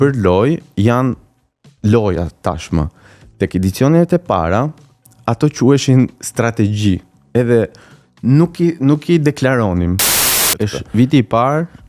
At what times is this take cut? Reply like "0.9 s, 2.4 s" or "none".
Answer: 10.4 s